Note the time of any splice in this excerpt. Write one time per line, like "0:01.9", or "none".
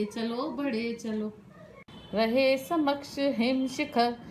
0:01.9